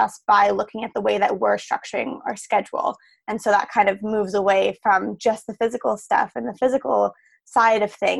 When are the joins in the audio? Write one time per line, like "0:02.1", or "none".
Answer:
none